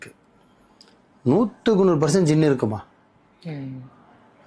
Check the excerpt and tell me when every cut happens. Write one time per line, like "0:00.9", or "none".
none